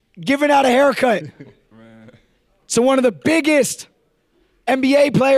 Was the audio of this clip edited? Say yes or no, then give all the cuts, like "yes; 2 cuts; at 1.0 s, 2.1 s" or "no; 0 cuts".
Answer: no; 0 cuts